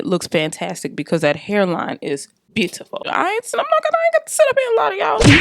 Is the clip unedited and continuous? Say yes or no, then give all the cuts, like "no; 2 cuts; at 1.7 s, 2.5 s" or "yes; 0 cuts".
no; 1 cut; at 3.1 s